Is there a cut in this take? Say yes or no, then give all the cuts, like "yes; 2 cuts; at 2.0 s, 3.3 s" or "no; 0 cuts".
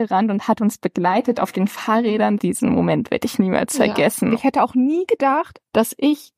yes; 2 cuts; at 2.4 s, 4.4 s